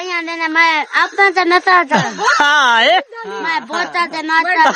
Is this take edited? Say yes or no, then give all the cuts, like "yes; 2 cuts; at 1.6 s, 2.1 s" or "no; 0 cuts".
no; 0 cuts